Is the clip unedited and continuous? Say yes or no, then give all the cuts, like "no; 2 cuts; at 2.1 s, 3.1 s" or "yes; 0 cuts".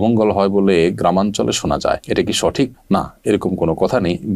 yes; 0 cuts